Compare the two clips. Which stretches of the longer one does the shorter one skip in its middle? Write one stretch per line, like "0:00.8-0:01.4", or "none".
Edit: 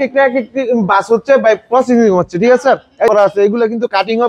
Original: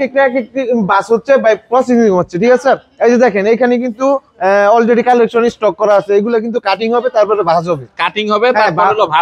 0:03.1-0:05.8